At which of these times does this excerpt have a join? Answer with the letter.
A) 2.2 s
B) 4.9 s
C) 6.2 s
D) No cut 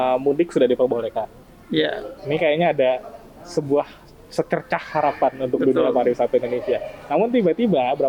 D